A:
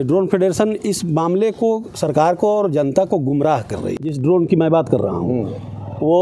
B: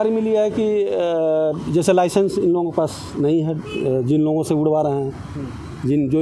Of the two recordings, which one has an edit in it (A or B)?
A